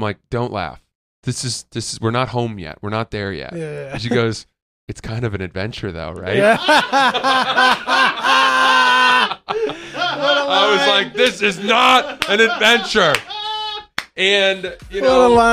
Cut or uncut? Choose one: uncut